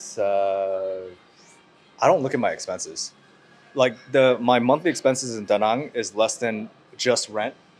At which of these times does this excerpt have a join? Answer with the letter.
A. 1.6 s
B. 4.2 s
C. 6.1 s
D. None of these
D